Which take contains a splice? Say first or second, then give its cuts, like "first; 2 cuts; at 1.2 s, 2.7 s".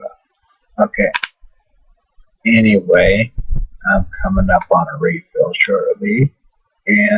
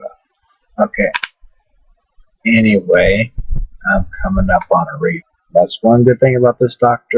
first; 1 cut; at 5.3 s